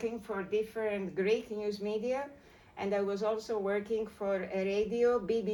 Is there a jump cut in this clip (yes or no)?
no